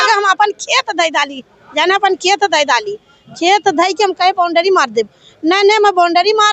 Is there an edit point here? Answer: no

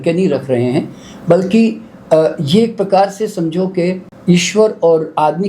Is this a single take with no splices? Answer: no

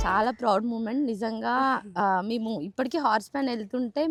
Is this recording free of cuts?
yes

